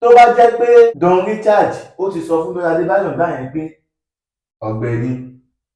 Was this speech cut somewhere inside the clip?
yes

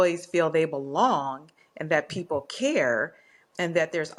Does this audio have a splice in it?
no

